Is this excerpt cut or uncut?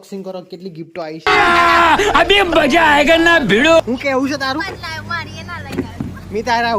cut